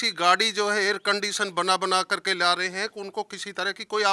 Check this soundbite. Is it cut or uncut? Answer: uncut